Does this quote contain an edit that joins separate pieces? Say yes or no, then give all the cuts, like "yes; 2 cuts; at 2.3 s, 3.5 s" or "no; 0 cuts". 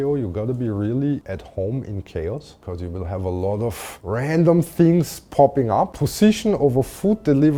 no; 0 cuts